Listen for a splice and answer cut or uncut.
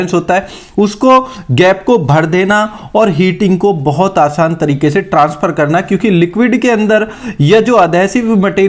uncut